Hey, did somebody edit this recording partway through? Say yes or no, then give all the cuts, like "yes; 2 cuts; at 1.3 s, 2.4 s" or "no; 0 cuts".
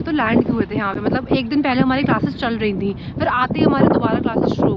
no; 0 cuts